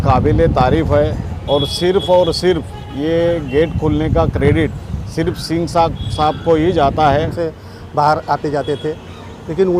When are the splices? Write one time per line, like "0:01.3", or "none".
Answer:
0:07.3